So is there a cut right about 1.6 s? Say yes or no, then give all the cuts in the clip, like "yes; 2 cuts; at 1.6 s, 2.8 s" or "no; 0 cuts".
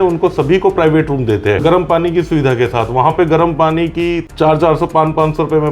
yes; 2 cuts; at 1.6 s, 4.2 s